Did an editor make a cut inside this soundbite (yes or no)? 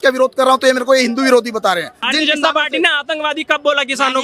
yes